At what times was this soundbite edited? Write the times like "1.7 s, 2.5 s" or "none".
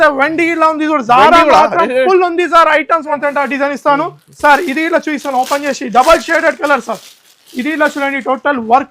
3.1 s